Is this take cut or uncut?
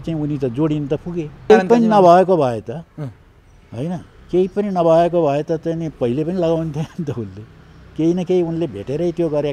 cut